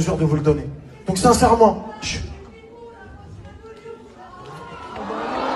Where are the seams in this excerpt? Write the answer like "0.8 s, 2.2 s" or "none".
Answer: none